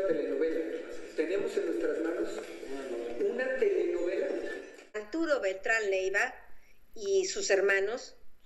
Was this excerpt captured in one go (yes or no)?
no